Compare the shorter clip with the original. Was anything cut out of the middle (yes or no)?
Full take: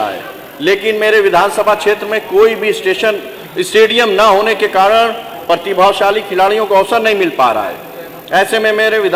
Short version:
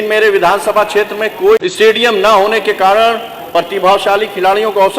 yes